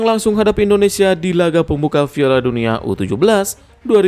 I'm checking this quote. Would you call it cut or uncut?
uncut